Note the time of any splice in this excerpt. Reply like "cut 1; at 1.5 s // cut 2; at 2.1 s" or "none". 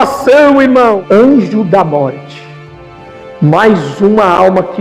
cut 1; at 1.0 s